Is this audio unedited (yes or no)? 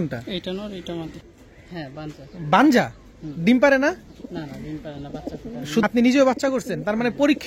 no